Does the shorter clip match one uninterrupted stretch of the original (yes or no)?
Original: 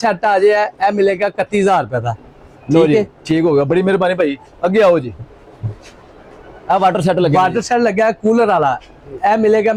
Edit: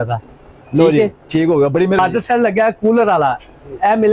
no